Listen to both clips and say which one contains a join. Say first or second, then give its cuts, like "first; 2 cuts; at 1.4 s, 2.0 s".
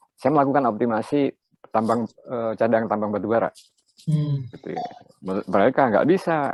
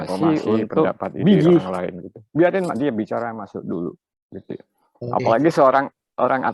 second; 1 cut; at 1.7 s